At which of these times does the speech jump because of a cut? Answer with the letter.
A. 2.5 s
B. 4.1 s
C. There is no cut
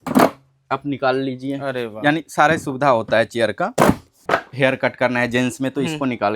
B